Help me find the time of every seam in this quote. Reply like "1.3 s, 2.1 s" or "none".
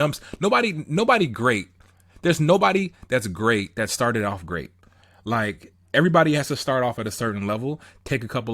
5.7 s